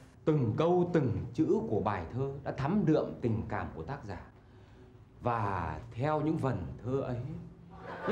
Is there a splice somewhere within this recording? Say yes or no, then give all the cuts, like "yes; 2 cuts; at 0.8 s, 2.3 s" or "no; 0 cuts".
no; 0 cuts